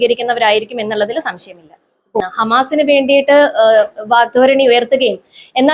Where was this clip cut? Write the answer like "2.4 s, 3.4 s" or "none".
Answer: 2.2 s